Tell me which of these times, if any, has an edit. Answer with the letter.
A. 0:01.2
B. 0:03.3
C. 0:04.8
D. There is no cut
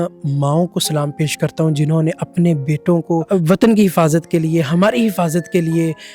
B